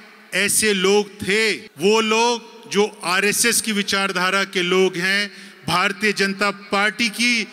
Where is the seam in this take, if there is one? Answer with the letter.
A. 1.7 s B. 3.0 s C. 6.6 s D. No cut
A